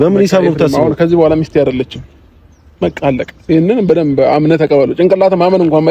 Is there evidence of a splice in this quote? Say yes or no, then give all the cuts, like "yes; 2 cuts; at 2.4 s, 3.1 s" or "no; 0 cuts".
no; 0 cuts